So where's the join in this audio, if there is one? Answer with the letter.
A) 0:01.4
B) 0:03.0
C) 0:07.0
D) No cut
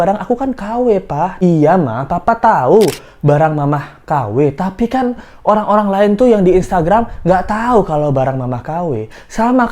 A